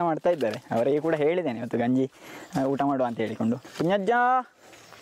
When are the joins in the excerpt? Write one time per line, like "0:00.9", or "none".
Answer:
0:03.7